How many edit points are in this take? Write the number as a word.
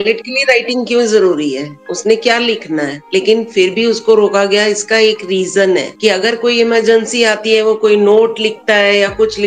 one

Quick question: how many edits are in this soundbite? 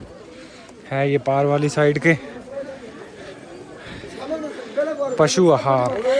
zero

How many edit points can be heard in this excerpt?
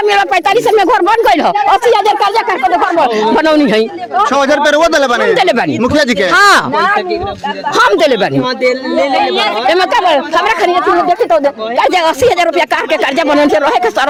zero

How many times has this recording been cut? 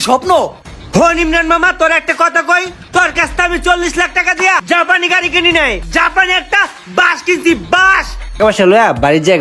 two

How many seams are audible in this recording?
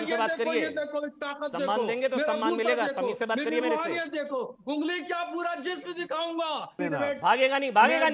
one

